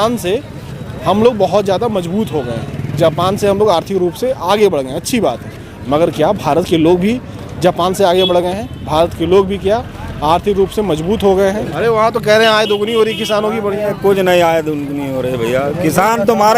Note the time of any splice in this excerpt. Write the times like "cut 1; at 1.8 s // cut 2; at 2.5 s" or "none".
cut 1; at 11.9 s